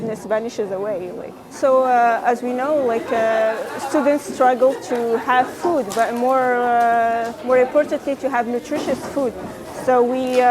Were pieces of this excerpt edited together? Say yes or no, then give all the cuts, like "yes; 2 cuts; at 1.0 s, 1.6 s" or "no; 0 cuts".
no; 0 cuts